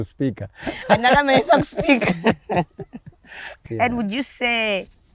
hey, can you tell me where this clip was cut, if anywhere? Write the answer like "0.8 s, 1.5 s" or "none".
3.6 s